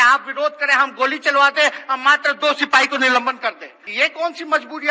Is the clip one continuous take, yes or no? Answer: no